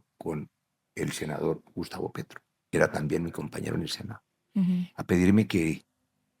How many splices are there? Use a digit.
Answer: 1